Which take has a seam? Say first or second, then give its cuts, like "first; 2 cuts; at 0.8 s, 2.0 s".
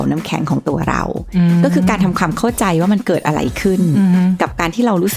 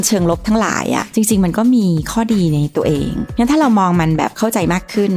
second; 1 cut; at 1.1 s